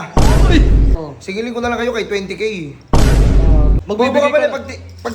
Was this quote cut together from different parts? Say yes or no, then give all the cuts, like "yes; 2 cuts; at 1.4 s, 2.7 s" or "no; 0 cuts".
yes; 2 cuts; at 0.9 s, 3.8 s